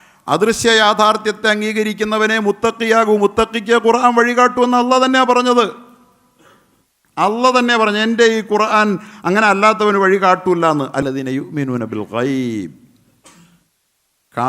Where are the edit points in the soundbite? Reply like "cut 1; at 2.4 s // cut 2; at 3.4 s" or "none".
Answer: cut 1; at 11.0 s